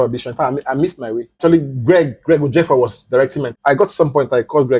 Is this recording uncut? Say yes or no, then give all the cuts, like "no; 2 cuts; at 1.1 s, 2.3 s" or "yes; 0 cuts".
no; 2 cuts; at 1.4 s, 3.5 s